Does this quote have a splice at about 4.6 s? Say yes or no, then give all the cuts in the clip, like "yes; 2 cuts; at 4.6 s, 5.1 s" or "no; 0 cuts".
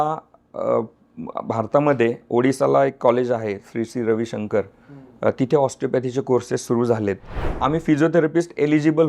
no; 1 cut; at 7.5 s